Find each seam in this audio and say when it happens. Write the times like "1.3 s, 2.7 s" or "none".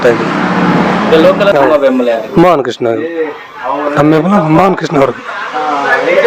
1.7 s